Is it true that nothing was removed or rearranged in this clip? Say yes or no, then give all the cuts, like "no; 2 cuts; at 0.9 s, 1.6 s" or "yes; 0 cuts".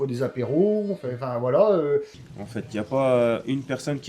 no; 1 cut; at 2.2 s